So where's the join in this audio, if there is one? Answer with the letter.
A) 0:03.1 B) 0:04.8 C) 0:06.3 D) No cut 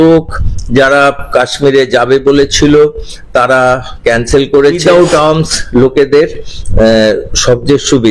B